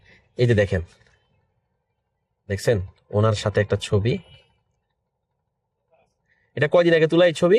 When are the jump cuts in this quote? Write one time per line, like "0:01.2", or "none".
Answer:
none

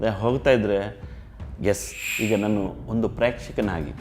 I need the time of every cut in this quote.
0:02.2

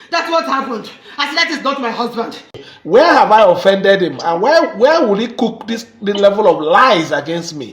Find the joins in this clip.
0:02.6

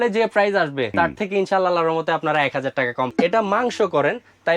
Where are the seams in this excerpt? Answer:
0:00.9
0:03.1

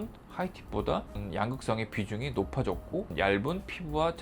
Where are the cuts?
0:01.2
0:03.1

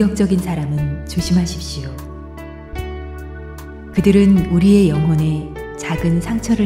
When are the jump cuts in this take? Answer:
none

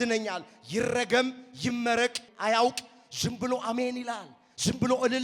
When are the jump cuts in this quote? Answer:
0:02.3

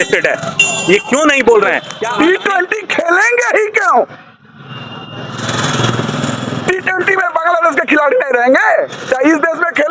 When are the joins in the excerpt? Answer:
0:01.9

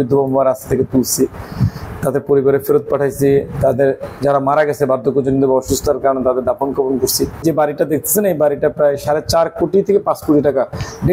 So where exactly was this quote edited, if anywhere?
0:07.4

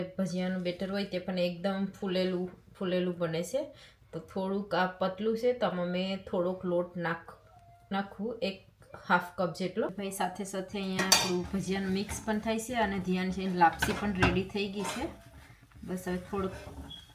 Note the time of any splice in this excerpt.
none

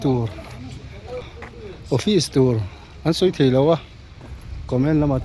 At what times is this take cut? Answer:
0:01.2

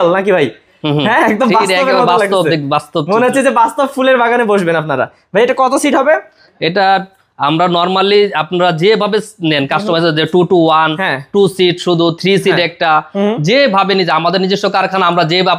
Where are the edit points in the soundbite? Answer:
none

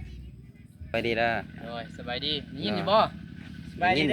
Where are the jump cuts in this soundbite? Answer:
0:00.9

